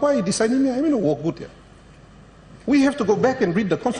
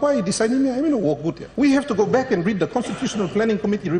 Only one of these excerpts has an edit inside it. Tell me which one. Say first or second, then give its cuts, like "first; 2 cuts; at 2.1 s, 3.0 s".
second; 1 cut; at 1.4 s